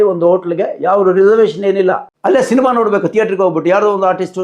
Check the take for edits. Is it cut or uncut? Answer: cut